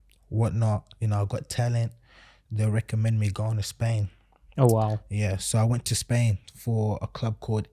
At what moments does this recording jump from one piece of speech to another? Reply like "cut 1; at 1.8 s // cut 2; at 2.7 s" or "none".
none